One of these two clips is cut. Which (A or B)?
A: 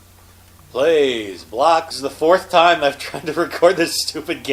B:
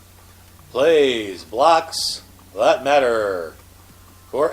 B